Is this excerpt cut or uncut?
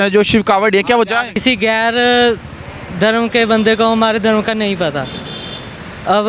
cut